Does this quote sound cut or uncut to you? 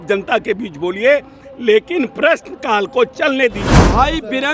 cut